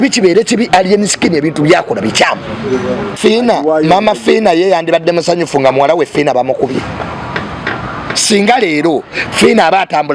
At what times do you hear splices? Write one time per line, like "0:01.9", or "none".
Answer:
0:03.1